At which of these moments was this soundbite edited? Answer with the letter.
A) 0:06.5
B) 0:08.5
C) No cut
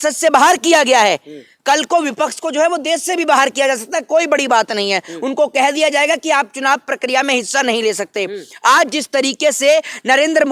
C